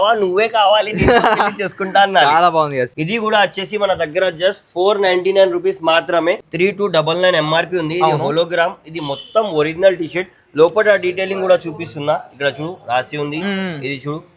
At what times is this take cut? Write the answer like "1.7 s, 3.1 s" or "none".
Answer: 2.9 s, 6.4 s